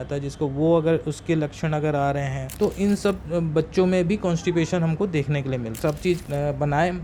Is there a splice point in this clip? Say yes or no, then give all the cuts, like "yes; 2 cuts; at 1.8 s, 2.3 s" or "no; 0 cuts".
yes; 3 cuts; at 2.4 s, 3.2 s, 5.8 s